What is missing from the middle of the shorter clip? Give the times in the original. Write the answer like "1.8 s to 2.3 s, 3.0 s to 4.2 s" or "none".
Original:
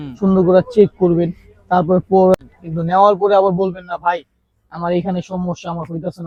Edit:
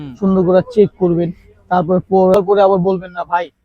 2.4 s to 3.1 s